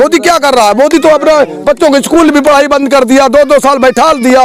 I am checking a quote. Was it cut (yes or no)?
no